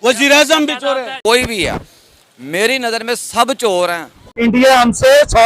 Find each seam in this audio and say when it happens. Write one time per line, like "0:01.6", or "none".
0:01.1
0:04.3